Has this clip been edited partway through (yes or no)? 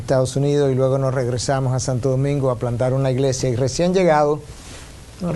yes